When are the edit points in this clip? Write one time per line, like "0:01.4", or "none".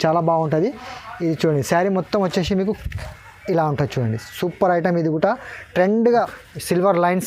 0:06.4